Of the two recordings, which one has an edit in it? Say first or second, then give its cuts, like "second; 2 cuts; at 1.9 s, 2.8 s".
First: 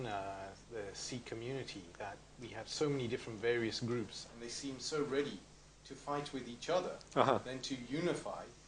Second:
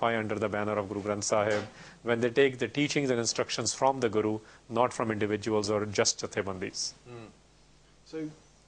second; 1 cut; at 6.2 s